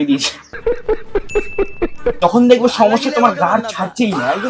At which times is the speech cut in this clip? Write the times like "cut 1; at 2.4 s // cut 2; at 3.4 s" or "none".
cut 1; at 2.2 s